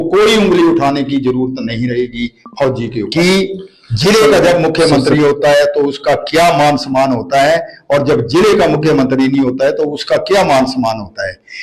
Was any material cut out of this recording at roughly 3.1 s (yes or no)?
yes